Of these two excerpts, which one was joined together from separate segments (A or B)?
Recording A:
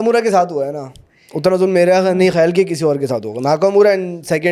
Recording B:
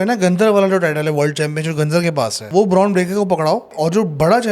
B